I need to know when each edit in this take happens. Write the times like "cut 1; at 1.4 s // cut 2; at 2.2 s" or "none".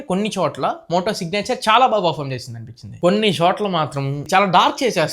cut 1; at 2.9 s